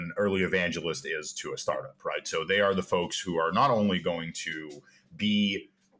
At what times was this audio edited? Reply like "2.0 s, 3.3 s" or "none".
none